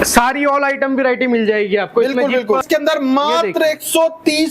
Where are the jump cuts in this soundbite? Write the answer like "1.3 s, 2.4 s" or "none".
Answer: 2.6 s